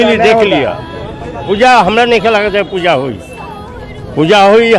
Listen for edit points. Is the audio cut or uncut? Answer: cut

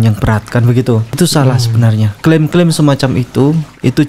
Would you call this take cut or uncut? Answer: cut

